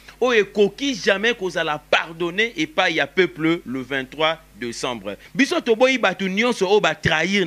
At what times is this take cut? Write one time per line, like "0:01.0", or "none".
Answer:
0:05.2